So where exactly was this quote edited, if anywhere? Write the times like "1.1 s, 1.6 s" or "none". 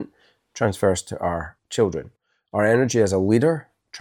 1.6 s